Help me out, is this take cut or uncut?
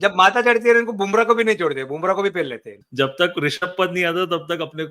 cut